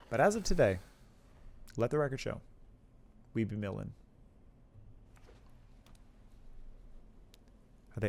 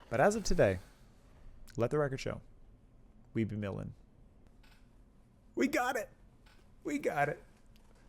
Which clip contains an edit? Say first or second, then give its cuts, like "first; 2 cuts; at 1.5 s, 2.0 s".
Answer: second; 1 cut; at 4.5 s